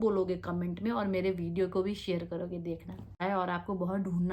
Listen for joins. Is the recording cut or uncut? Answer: cut